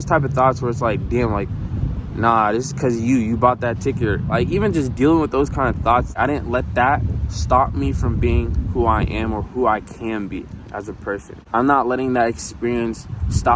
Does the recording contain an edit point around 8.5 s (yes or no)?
no